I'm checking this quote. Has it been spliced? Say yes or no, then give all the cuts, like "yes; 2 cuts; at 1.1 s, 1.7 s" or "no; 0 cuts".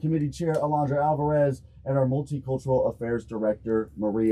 no; 0 cuts